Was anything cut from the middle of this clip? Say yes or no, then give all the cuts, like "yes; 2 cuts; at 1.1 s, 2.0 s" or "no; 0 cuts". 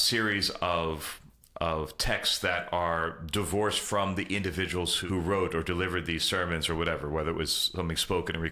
no; 0 cuts